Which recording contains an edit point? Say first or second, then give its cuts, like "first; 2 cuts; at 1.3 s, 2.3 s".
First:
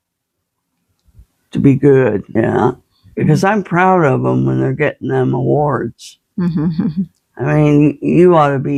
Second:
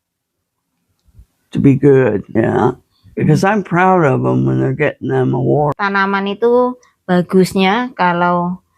second; 1 cut; at 5.7 s